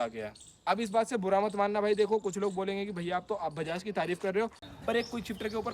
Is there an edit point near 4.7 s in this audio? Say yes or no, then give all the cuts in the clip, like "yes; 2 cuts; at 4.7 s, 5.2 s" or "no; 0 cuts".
yes; 1 cut; at 4.7 s